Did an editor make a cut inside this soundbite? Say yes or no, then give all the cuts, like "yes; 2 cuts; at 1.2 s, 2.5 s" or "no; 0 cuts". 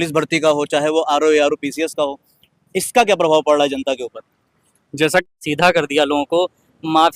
yes; 1 cut; at 5.3 s